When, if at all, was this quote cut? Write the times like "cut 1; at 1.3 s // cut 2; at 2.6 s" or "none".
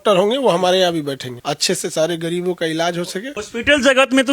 cut 1; at 1.3 s // cut 2; at 3.4 s

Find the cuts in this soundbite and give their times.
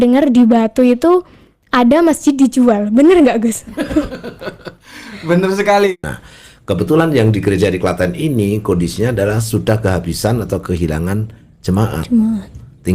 cut 1; at 5.9 s

